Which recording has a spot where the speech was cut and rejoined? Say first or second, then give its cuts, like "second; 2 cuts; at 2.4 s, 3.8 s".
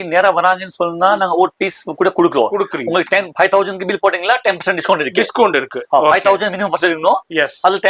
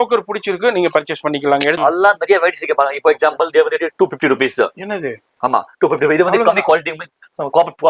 second; 1 cut; at 1.8 s